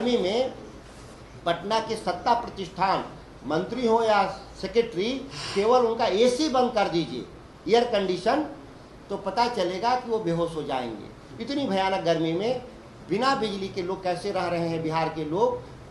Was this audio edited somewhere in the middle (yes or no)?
no